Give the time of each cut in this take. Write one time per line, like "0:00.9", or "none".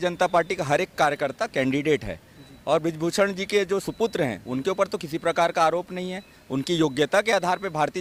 none

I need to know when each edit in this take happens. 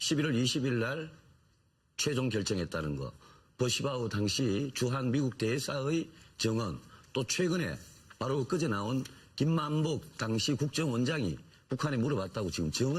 0:09.6

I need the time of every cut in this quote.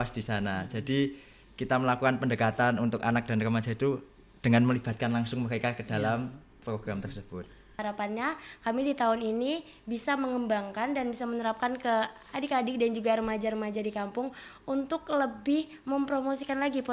0:07.8

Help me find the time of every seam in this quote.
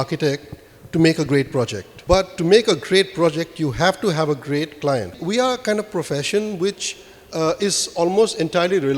0:01.9
0:05.1

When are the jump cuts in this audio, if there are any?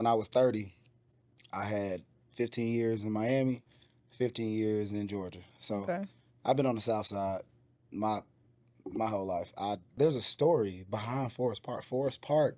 0:10.0

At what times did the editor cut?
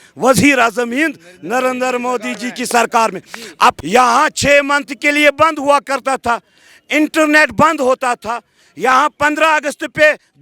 0:03.8

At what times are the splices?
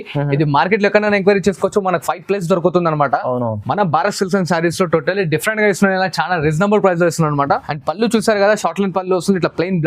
0:07.7

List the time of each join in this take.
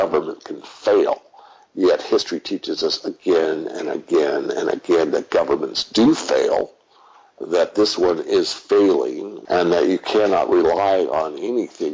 0:09.3

